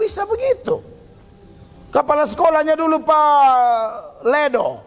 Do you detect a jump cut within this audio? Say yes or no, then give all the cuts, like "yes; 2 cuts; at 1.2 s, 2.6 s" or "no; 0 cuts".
no; 0 cuts